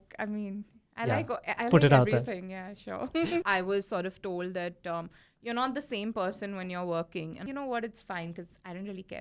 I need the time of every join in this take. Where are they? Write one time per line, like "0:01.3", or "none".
0:03.4
0:07.4